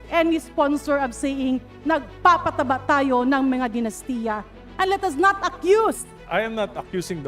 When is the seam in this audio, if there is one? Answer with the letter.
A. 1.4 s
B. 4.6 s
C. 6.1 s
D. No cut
C